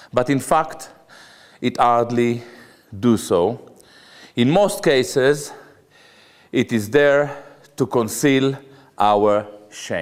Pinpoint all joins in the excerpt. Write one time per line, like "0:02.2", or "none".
none